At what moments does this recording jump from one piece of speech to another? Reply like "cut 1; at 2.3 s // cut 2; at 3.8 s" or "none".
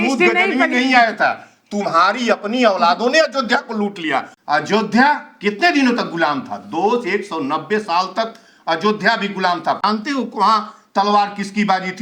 cut 1; at 4.3 s // cut 2; at 9.8 s